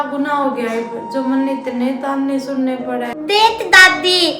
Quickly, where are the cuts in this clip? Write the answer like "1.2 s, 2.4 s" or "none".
3.1 s